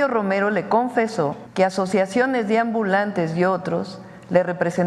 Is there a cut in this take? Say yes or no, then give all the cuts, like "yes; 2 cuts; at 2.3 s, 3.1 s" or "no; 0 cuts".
yes; 1 cut; at 1.4 s